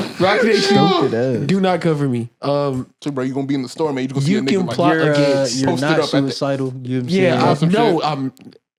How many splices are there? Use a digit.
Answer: 0